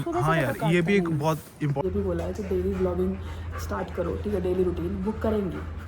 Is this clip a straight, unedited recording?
no; 1 cut; at 1.8 s

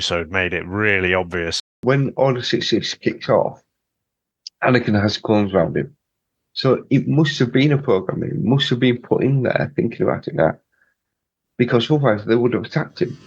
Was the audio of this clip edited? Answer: yes; 1 cut; at 1.8 s

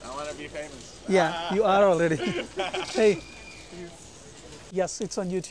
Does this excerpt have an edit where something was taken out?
yes; 1 cut; at 4.6 s

